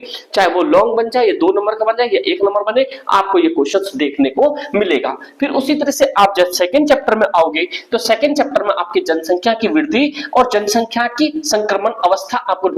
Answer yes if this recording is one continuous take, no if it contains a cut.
yes